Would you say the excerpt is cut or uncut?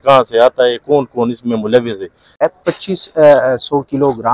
cut